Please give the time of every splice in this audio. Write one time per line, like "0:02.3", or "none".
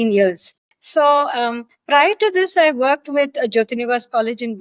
none